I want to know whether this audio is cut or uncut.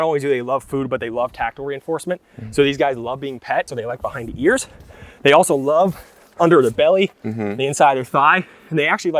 cut